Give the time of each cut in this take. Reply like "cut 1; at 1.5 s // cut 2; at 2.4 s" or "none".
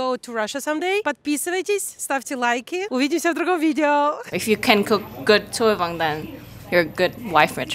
cut 1; at 1.0 s // cut 2; at 2.9 s // cut 3; at 4.2 s